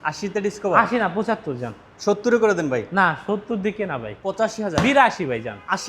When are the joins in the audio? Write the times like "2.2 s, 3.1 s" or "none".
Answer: 4.4 s